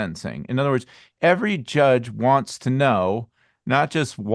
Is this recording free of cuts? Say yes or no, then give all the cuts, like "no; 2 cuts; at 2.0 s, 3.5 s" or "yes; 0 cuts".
yes; 0 cuts